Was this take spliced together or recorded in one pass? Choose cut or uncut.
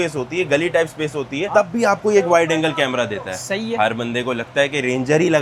uncut